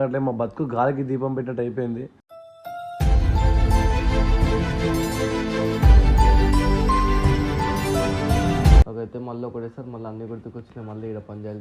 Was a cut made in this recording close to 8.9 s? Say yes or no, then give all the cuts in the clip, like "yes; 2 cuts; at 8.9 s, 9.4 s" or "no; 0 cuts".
yes; 1 cut; at 8.9 s